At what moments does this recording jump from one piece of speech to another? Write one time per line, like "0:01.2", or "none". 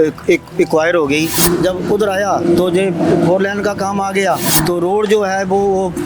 0:01.4
0:04.5